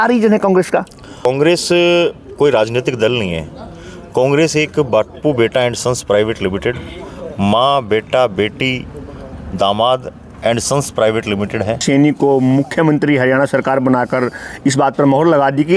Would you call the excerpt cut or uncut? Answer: cut